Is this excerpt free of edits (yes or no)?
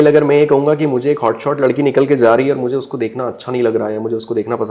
yes